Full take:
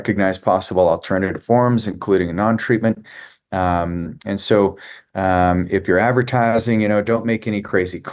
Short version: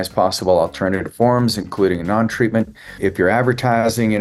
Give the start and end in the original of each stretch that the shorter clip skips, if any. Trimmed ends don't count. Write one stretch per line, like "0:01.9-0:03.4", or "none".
0:03.3-0:05.7